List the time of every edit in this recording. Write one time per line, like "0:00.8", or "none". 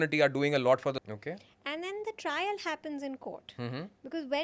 0:01.1